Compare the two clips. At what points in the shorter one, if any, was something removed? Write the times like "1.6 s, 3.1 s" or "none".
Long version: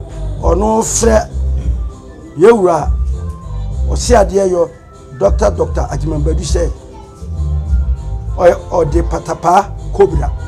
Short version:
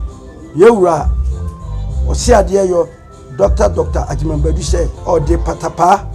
5.0 s